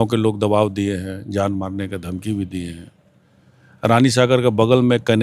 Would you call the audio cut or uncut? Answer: uncut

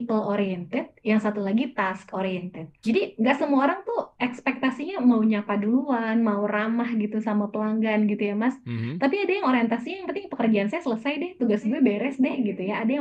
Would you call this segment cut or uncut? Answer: cut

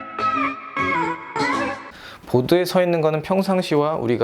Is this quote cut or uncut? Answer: cut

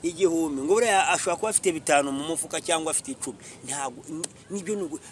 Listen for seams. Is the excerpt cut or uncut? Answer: uncut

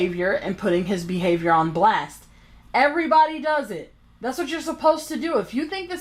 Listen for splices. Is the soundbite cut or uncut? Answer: cut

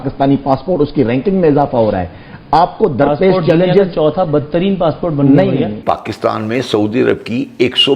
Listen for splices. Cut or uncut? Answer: cut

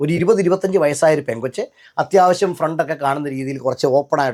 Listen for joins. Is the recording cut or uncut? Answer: uncut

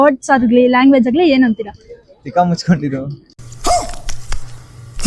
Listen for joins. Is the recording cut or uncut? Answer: uncut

